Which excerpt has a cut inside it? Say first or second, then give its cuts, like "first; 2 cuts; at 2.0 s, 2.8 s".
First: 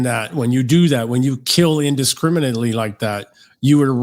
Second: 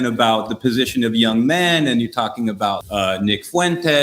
second; 1 cut; at 2.8 s